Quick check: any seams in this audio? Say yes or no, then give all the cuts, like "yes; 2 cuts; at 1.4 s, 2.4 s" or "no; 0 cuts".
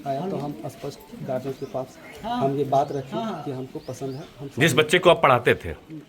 no; 0 cuts